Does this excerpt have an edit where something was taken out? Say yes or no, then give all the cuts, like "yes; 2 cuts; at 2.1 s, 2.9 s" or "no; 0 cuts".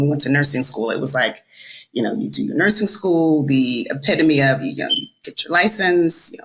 no; 0 cuts